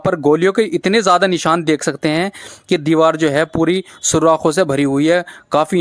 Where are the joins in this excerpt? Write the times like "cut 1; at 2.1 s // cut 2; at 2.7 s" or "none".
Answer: none